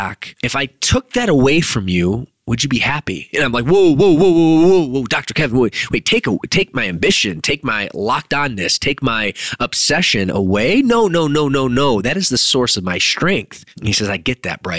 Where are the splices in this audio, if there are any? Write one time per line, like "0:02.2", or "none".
0:13.6